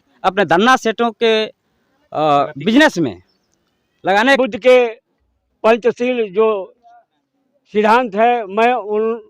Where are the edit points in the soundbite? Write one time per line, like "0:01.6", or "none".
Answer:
0:04.4